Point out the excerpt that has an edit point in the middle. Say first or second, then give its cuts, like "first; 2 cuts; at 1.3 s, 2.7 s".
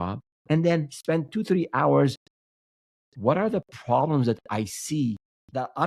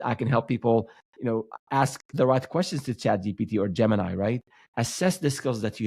second; 1 cut; at 4.6 s